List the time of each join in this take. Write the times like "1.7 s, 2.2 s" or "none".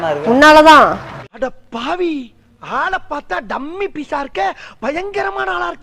1.1 s